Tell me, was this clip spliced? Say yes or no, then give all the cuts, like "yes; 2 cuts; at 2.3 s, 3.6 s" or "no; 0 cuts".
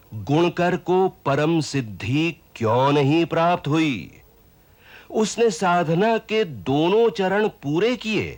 no; 0 cuts